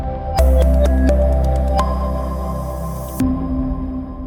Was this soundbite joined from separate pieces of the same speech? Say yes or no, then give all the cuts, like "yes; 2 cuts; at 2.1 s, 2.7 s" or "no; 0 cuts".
no; 0 cuts